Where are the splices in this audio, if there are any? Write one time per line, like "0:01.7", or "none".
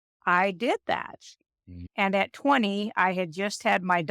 0:01.7